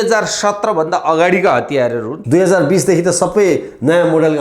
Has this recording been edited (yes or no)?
yes